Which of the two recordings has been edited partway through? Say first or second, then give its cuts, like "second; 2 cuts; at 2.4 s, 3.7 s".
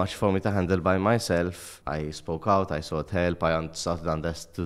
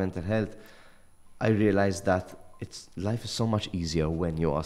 first; 1 cut; at 1.7 s